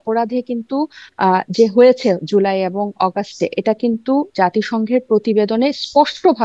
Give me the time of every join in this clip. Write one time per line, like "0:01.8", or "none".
none